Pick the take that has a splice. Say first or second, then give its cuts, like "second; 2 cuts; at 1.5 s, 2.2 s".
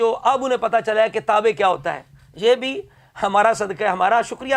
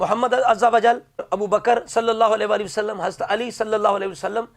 second; 1 cut; at 1.3 s